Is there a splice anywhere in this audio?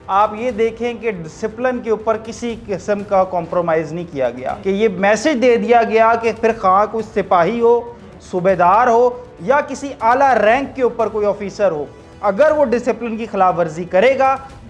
yes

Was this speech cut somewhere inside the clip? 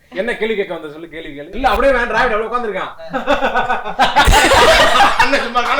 yes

